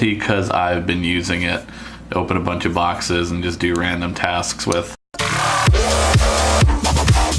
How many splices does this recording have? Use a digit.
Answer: 0